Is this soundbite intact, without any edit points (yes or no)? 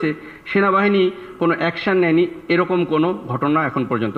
yes